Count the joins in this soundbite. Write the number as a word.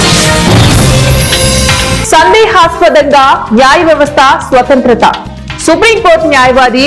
one